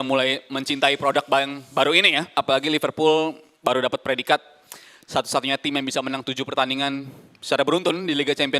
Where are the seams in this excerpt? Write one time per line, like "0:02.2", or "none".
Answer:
0:02.3